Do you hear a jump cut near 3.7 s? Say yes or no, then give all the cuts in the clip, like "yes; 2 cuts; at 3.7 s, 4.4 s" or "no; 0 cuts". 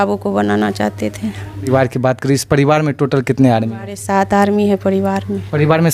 no; 1 cut; at 1.7 s